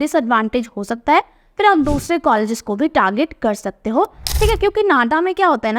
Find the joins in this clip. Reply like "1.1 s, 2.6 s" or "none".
4.2 s